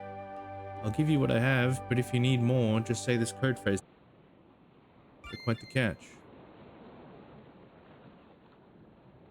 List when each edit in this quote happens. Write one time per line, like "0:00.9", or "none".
0:03.9